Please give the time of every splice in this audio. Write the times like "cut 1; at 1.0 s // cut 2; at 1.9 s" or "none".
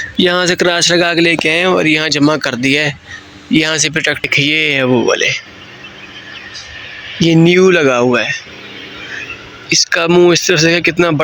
cut 1; at 4.3 s